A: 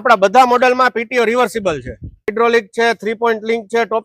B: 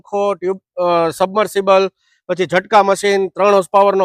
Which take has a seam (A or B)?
A